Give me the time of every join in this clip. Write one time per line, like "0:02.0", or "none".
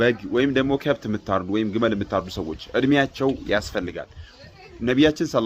none